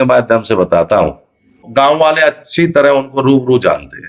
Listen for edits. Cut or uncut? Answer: cut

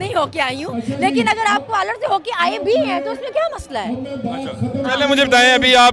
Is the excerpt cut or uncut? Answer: uncut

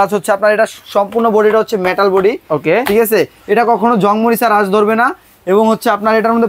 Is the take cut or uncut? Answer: uncut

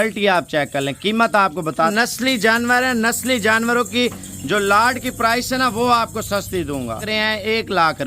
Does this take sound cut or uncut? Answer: cut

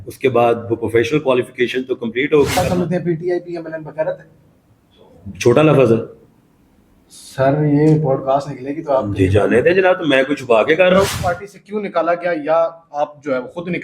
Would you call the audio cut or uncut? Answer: cut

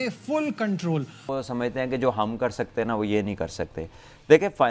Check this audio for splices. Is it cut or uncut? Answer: cut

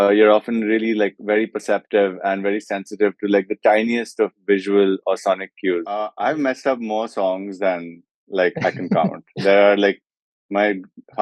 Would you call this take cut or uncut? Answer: cut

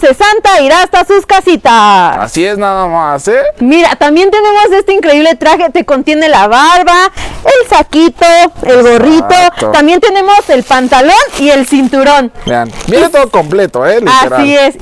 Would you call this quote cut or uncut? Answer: uncut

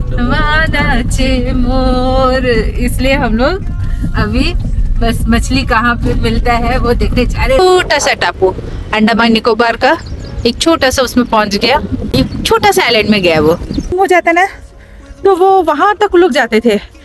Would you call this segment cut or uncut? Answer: cut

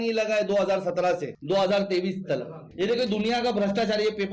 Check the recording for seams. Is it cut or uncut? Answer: cut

